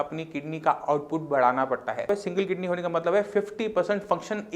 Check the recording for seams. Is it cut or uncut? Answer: cut